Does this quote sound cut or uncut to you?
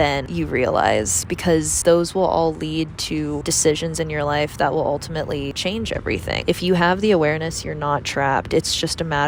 uncut